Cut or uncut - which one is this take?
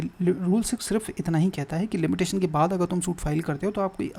uncut